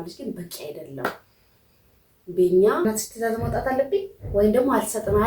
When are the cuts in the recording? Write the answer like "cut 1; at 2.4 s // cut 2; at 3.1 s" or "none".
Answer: cut 1; at 2.8 s